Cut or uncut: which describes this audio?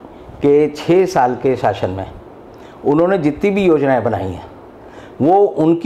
uncut